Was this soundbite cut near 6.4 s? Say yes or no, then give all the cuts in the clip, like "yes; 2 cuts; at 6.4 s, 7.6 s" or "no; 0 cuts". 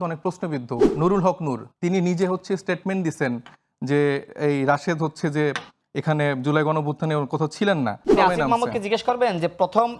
no; 2 cuts; at 0.9 s, 8.1 s